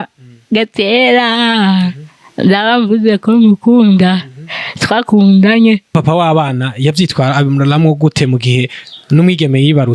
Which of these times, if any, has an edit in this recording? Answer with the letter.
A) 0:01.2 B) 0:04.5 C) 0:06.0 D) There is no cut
C